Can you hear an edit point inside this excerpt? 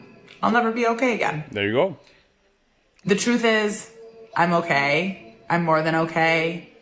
no; 0 cuts

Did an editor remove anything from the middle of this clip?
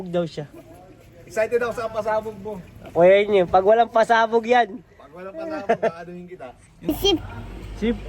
yes; 1 cut; at 6.9 s

